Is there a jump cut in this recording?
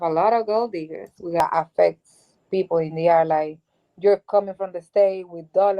yes; 1 cut; at 1.4 s

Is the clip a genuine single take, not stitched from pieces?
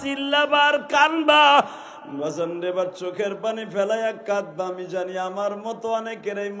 no; 1 cut; at 1.8 s

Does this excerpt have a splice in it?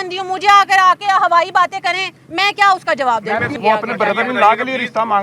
yes; 1 cut; at 3.5 s

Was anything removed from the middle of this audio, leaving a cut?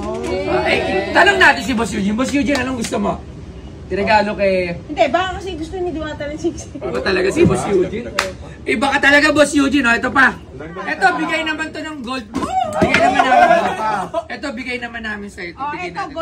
yes; 2 cuts; at 6.8 s, 10.7 s

